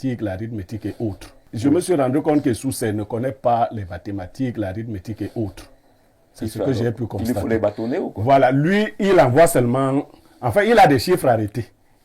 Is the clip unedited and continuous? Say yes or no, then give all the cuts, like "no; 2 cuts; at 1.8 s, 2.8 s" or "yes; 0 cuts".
no; 1 cut; at 1.5 s